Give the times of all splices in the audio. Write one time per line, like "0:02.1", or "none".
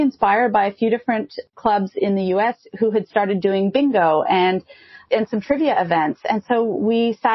none